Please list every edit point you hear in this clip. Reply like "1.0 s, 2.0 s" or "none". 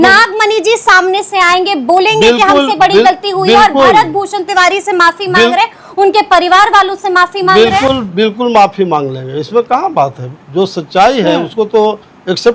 none

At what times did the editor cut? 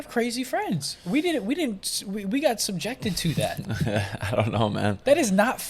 none

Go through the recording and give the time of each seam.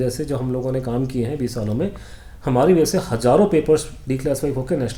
none

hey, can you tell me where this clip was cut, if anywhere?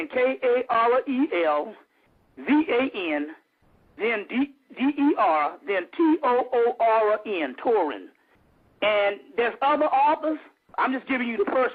none

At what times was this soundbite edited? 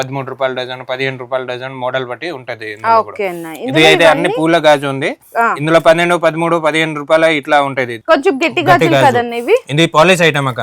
none

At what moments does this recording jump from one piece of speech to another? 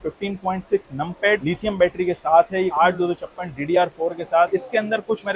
2.7 s, 4.5 s

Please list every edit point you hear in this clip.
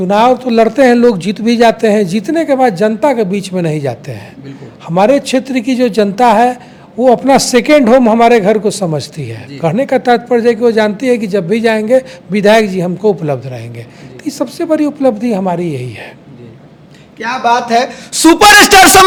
none

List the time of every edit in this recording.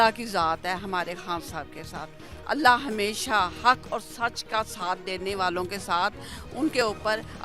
none

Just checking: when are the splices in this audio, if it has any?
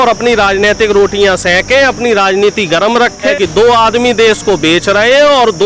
3.3 s

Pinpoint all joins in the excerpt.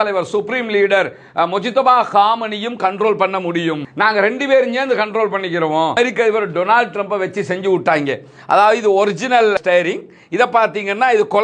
5.9 s

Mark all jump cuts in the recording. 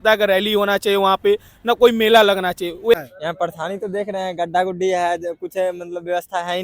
2.9 s

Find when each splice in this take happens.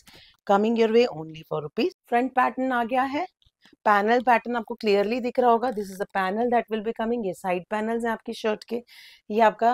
2.0 s

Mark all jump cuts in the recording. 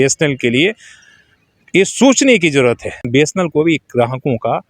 3.0 s

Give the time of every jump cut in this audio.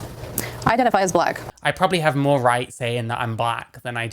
1.5 s

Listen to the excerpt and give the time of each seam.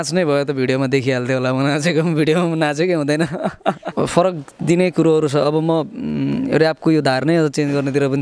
3.9 s

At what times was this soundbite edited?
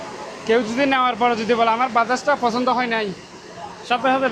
none

